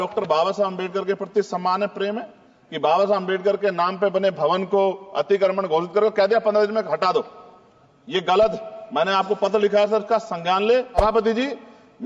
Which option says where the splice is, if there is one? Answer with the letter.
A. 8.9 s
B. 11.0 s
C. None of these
B